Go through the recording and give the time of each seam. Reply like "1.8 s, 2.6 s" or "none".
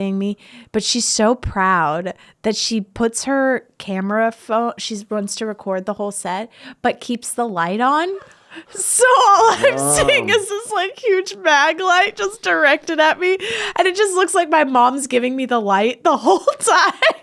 none